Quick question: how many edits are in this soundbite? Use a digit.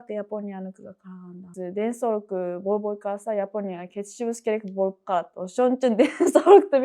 1